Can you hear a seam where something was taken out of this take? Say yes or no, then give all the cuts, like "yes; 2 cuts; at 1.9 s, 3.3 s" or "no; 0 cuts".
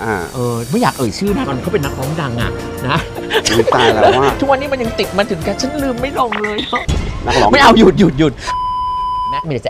no; 0 cuts